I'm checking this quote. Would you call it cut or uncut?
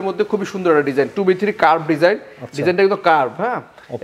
uncut